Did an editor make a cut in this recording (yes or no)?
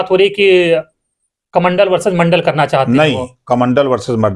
no